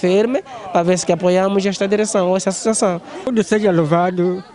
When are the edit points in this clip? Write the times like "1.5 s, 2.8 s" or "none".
3.1 s